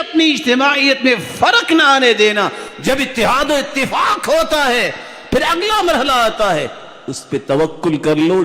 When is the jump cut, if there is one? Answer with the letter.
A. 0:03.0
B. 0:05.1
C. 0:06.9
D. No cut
D